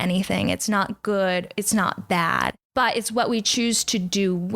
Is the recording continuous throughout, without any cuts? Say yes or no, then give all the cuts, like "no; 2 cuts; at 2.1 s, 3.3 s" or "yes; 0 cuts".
no; 1 cut; at 2.6 s